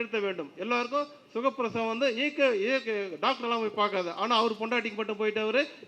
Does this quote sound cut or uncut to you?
uncut